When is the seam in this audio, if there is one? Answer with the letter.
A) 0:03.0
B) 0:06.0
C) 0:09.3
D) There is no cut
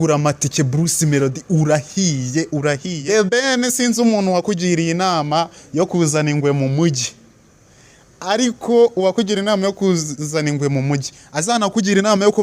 A